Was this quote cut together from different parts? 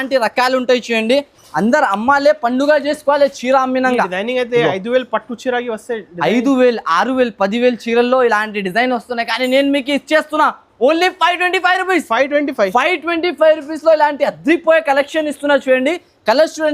no; 0 cuts

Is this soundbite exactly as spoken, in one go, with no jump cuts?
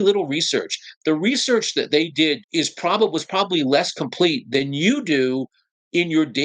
no; 1 cut; at 2.4 s

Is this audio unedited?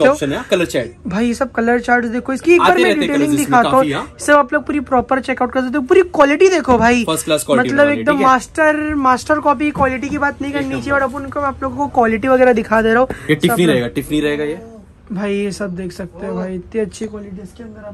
yes; 0 cuts

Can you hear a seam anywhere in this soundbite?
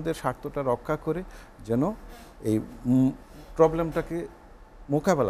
no; 0 cuts

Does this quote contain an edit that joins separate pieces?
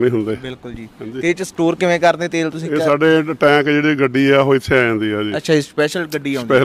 no; 0 cuts

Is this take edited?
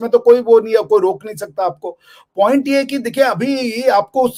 no; 0 cuts

